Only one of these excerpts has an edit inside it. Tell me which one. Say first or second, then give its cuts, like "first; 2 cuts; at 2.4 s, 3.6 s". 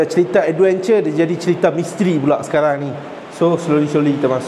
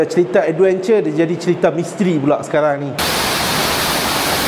second; 1 cut; at 3.0 s